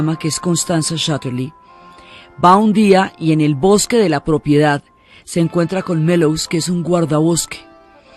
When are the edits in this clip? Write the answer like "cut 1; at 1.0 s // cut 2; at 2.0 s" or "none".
cut 1; at 6.1 s